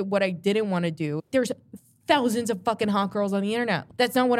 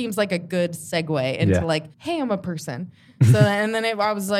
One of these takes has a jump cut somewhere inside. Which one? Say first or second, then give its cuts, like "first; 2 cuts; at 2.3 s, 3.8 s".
first; 1 cut; at 1.3 s